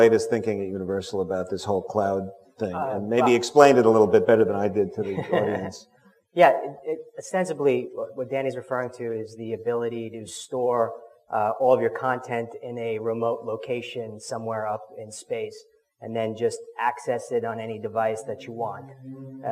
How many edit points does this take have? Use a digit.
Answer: 1